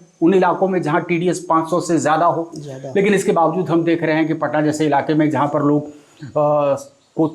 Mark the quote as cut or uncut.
uncut